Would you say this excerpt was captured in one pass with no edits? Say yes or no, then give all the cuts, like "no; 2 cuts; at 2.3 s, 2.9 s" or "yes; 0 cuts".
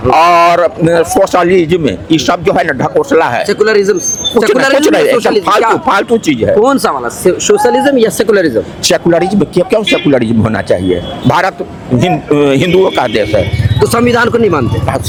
yes; 0 cuts